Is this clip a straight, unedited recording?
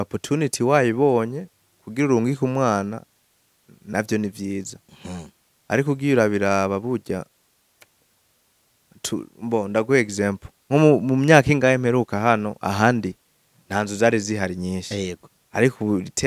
yes; 0 cuts

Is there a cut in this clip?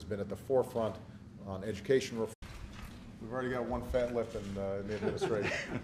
no; 0 cuts

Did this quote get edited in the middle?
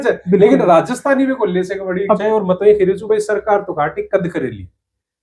yes; 1 cut; at 2.2 s

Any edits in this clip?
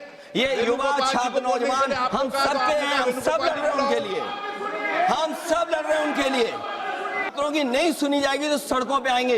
yes; 1 cut; at 7.3 s

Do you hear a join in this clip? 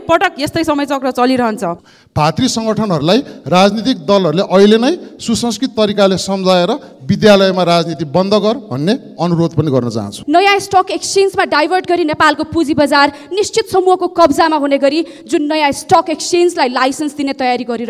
yes; 2 cuts; at 1.9 s, 10.1 s

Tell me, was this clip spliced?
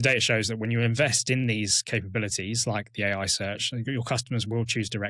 no; 0 cuts

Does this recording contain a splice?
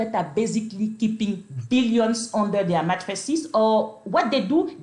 no; 0 cuts

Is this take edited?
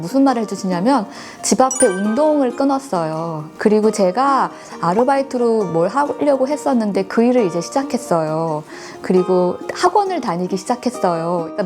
yes; 1 cut; at 3.4 s

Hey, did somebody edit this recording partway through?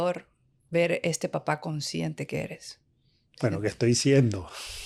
no; 0 cuts

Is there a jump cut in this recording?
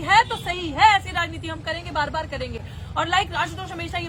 no; 0 cuts

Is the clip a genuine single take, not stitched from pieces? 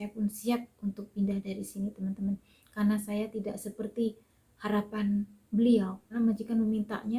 no; 1 cut; at 6.1 s

